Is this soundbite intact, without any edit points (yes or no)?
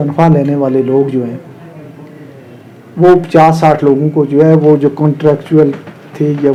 yes